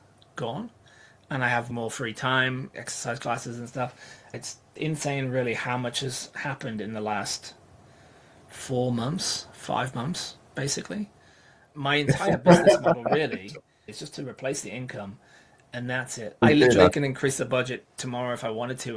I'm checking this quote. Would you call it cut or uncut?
cut